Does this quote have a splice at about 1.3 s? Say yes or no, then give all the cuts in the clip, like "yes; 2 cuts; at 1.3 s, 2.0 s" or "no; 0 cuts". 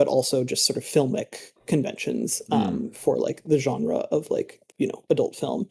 no; 1 cut; at 4.8 s